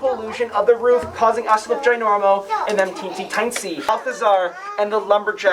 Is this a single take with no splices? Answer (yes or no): no